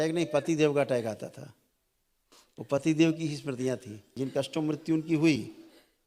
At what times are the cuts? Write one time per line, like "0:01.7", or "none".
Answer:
0:04.2